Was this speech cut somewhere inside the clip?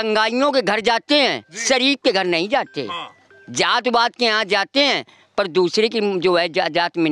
no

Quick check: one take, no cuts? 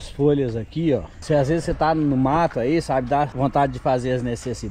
no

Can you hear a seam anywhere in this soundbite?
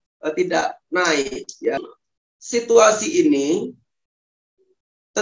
yes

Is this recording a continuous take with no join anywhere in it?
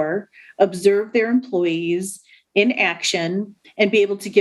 yes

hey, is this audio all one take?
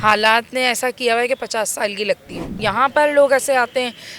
no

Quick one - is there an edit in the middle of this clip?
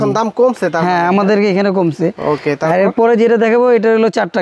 no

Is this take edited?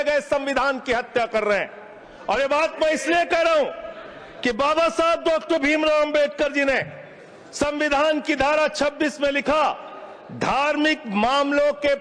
no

